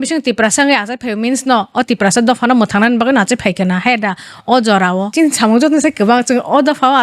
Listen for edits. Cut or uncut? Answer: cut